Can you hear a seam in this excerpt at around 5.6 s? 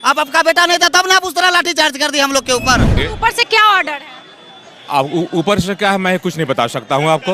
no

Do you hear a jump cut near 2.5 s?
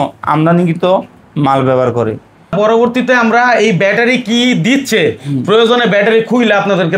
yes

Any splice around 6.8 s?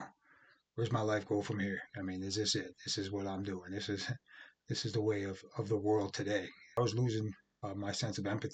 yes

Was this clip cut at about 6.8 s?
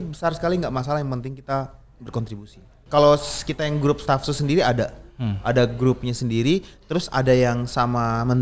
no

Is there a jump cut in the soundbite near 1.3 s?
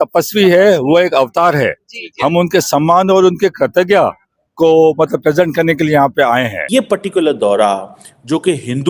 no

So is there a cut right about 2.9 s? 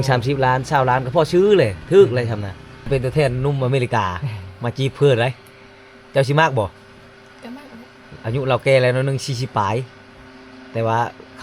yes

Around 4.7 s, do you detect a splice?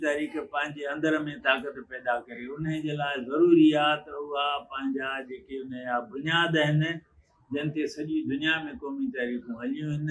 no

